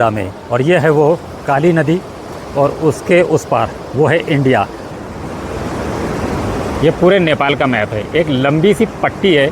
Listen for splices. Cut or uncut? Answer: cut